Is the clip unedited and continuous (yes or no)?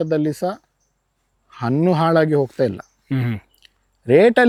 yes